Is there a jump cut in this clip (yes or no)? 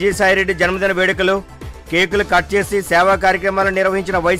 no